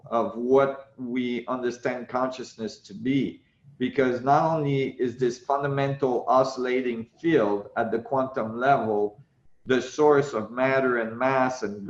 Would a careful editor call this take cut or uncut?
uncut